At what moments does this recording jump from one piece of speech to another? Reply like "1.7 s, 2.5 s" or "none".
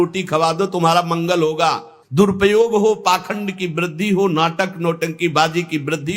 1.9 s